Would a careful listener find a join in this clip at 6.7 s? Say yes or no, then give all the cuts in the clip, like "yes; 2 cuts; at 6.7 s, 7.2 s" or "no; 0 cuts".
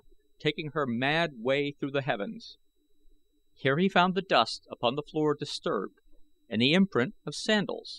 yes; 1 cut; at 6.7 s